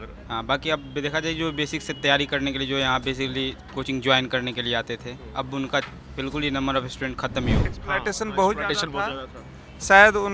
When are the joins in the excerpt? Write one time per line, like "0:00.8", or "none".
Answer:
0:07.7

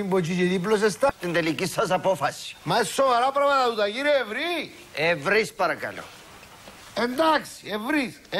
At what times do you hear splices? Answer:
0:01.1

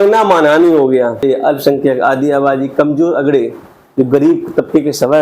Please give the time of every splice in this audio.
0:01.2

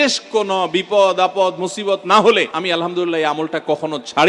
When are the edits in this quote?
0:02.5

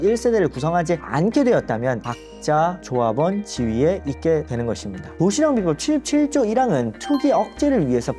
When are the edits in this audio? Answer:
0:05.1

